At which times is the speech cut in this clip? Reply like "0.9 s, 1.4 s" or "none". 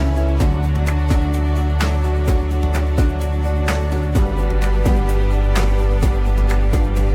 none